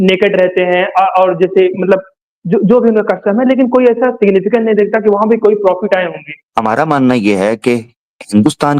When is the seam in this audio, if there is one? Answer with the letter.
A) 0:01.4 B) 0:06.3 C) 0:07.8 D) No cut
B